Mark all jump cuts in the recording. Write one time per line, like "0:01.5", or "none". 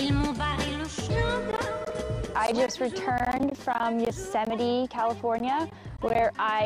0:01.0